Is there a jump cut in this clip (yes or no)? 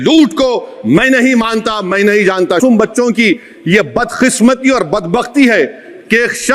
yes